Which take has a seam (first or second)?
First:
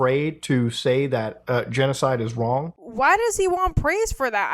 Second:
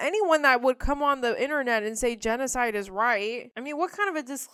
first